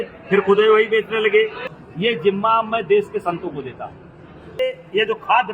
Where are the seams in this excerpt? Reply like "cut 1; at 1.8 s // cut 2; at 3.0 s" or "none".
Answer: cut 1; at 1.6 s // cut 2; at 4.6 s